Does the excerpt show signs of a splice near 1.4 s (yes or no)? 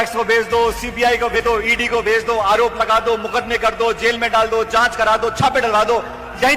yes